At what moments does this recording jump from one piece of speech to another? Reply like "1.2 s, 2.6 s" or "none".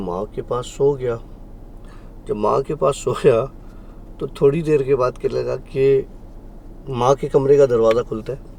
none

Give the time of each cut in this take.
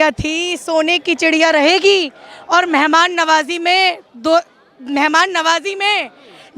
none

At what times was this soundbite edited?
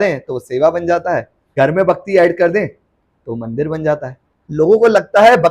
1.4 s, 4.4 s

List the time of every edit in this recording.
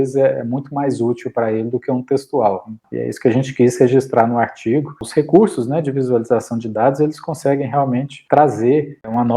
2.7 s, 5.0 s

